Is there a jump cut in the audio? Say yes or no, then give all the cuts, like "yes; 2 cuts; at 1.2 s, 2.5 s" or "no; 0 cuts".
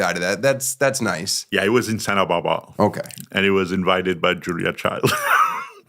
yes; 1 cut; at 1.3 s